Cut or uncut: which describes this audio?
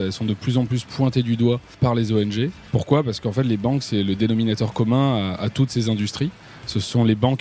cut